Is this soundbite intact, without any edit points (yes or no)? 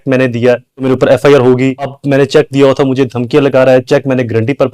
no